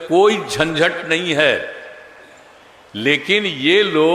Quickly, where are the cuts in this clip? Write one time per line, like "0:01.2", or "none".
none